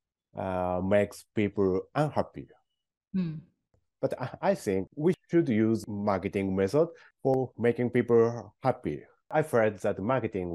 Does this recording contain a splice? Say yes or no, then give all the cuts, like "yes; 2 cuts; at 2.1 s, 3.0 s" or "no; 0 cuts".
yes; 1 cut; at 9.2 s